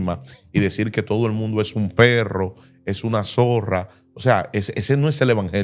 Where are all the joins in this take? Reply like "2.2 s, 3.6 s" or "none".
none